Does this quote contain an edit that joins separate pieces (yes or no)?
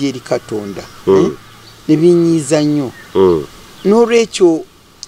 no